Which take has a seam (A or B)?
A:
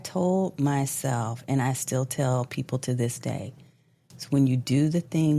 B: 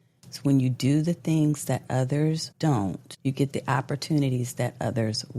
B